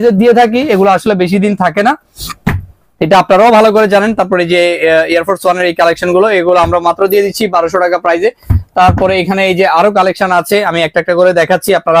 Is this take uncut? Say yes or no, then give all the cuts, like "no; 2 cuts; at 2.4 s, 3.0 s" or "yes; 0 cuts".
yes; 0 cuts